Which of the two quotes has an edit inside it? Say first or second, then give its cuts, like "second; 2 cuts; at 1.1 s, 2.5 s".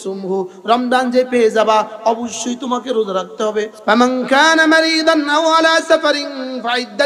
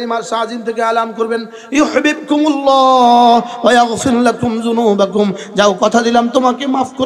first; 1 cut; at 3.7 s